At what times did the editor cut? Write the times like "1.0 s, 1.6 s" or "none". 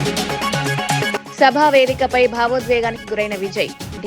1.0 s